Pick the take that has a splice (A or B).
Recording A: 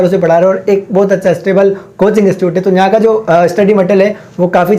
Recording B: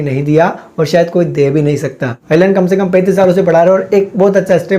B